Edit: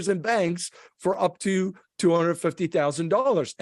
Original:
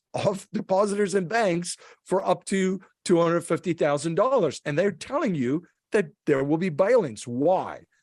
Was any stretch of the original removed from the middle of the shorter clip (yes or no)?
no